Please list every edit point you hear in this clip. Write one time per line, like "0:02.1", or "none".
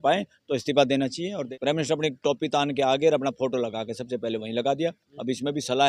0:01.4